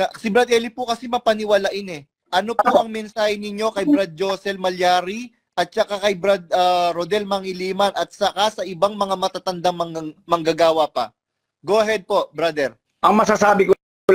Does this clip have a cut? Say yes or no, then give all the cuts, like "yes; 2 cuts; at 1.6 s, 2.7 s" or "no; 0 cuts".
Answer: yes; 2 cuts; at 2.2 s, 12.8 s